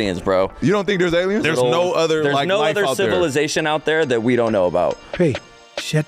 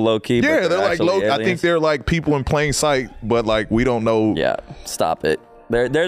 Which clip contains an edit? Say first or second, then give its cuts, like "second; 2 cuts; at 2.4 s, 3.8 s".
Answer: first; 1 cut; at 1.4 s